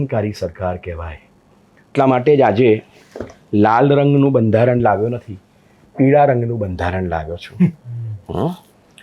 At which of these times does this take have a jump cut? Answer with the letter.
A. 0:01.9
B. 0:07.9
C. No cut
A